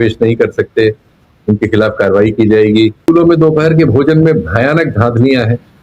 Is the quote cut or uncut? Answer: cut